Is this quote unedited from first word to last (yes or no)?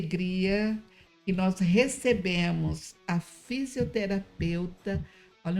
yes